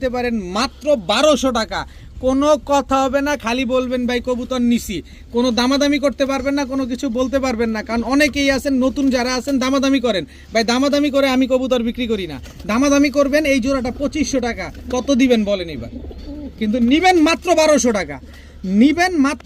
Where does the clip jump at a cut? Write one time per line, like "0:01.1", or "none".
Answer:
none